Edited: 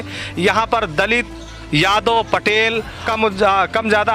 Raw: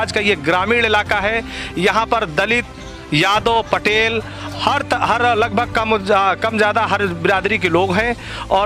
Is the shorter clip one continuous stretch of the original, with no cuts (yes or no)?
no